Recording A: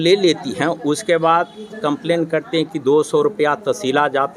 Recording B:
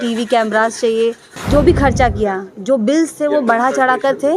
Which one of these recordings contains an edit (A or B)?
B